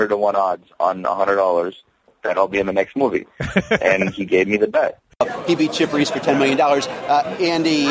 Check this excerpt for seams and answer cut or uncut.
cut